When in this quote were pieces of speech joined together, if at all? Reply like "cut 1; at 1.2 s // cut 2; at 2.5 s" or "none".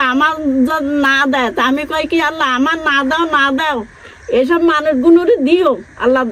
none